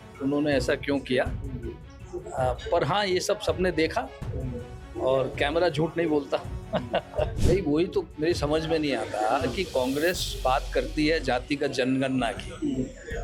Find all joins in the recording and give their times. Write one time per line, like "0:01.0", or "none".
0:07.4